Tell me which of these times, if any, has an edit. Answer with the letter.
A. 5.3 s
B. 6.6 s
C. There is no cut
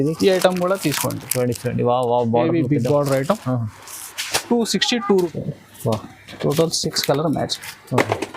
A